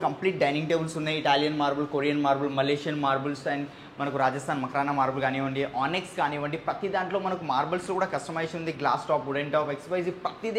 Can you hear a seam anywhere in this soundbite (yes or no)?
no